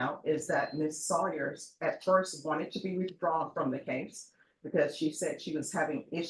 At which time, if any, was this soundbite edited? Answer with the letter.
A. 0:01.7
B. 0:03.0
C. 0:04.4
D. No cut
D